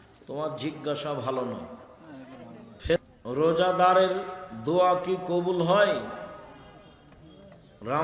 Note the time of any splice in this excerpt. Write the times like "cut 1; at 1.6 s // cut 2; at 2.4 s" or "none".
cut 1; at 3.0 s